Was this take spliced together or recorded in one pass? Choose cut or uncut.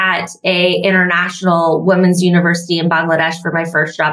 uncut